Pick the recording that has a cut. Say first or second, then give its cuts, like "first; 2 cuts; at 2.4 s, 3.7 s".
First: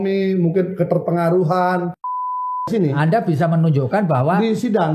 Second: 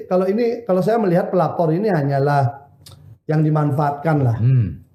first; 1 cut; at 2.4 s